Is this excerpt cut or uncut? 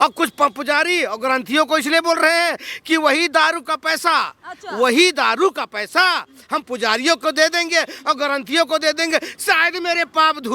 uncut